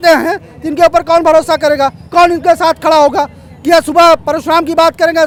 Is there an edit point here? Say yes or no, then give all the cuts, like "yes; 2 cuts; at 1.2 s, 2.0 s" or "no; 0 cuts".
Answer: no; 0 cuts